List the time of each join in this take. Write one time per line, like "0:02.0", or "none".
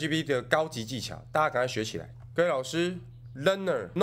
0:02.2